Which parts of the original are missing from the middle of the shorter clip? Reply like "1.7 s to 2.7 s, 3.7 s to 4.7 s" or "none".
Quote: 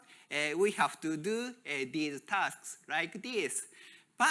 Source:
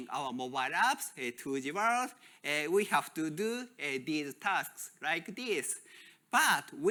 none